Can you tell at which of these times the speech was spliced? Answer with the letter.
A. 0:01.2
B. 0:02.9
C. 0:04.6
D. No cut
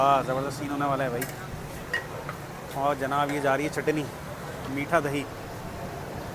C